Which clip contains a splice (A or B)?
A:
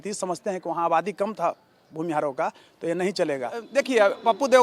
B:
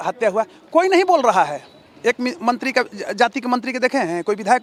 A